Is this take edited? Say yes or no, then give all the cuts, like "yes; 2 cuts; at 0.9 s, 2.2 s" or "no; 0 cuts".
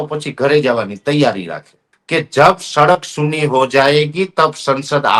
yes; 1 cut; at 1.9 s